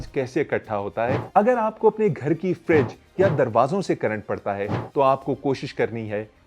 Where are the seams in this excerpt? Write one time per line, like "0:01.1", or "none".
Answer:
0:01.2